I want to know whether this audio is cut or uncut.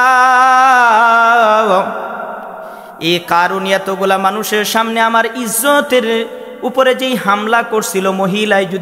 uncut